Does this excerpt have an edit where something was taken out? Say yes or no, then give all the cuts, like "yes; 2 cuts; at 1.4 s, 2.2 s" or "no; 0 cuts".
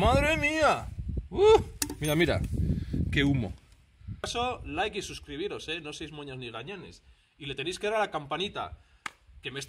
yes; 1 cut; at 4.3 s